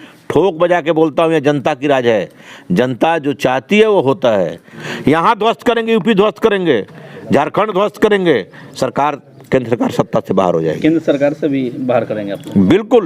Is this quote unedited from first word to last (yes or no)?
no